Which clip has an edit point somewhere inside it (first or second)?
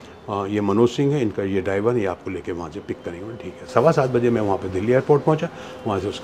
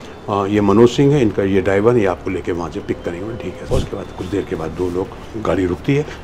second